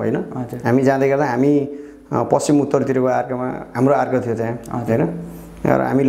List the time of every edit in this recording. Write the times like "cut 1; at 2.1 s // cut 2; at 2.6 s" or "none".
none